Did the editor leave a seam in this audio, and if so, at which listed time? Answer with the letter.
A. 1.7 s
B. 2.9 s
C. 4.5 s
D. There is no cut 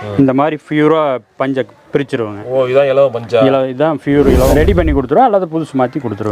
C